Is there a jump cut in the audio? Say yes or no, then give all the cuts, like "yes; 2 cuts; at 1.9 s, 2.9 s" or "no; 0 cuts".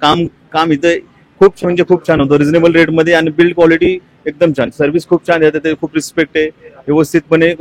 no; 0 cuts